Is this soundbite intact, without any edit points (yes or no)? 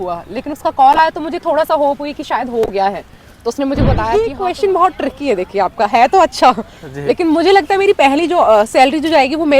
no